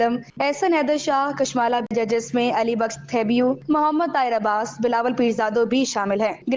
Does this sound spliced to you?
yes; 1 cut; at 1.9 s

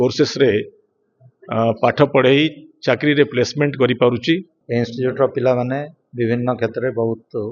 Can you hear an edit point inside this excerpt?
yes; 1 cut; at 4.6 s

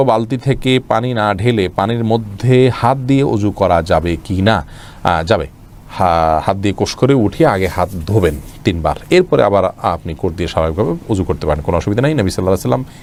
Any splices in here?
no; 0 cuts

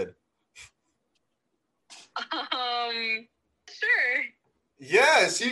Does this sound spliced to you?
yes; 1 cut; at 3.7 s

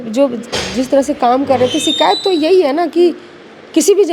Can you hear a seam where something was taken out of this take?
no; 0 cuts

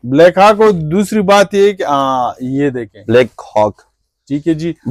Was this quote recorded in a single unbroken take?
yes; 0 cuts

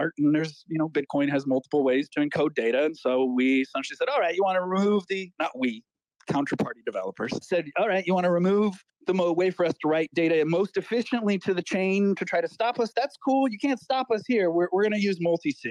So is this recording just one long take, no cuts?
no; 2 cuts; at 7.4 s, 12.9 s

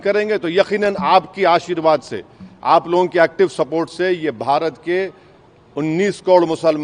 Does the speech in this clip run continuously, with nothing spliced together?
yes; 0 cuts

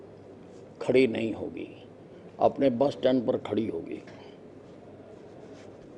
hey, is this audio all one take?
yes; 0 cuts

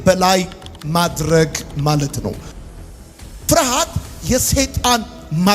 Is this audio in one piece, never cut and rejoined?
no; 1 cut; at 2.8 s

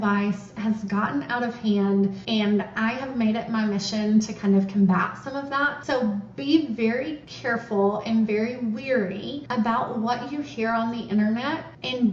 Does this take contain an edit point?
no; 0 cuts

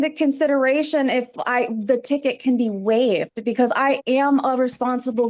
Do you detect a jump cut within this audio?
no; 0 cuts

